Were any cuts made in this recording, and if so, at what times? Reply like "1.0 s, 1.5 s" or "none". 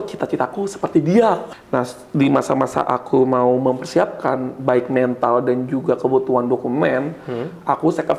1.5 s